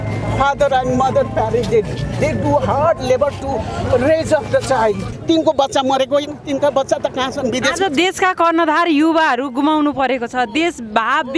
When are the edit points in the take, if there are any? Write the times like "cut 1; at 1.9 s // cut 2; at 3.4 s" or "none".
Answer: cut 1; at 5.1 s